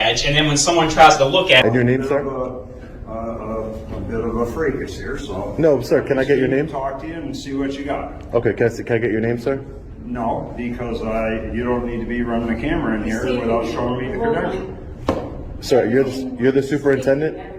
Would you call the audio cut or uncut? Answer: cut